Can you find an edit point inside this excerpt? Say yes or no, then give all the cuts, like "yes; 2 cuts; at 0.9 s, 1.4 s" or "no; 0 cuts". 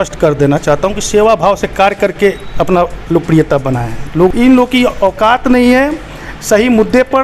yes; 1 cut; at 4.3 s